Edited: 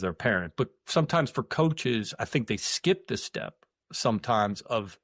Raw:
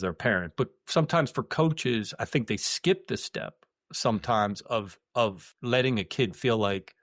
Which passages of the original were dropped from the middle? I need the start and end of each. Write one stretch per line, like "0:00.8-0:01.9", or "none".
none